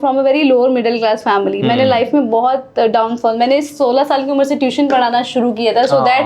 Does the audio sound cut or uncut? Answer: uncut